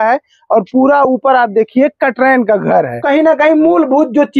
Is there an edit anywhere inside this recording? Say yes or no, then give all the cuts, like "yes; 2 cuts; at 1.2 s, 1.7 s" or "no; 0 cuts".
yes; 1 cut; at 3.0 s